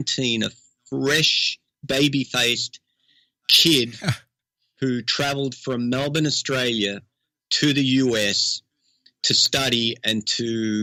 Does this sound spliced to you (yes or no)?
no